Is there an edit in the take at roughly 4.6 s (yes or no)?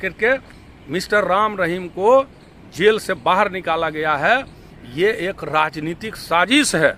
no